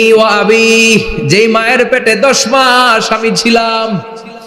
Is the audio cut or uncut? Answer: uncut